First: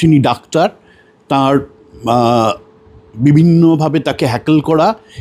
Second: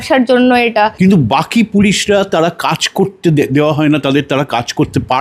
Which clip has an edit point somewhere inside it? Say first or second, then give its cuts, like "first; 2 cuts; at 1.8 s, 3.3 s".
second; 1 cut; at 0.9 s